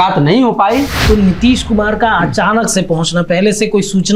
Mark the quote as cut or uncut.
cut